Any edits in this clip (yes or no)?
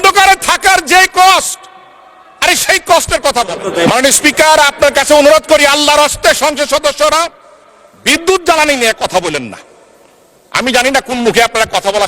yes